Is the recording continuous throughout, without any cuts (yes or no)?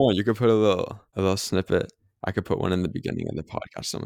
no